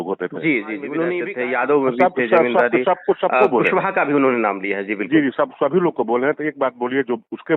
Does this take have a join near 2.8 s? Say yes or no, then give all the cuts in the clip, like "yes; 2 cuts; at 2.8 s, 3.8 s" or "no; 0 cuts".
no; 1 cut; at 1.3 s